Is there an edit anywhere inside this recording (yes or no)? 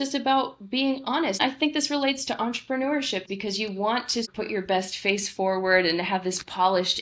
yes